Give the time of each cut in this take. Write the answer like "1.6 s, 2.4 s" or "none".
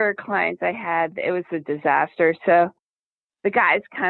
2.9 s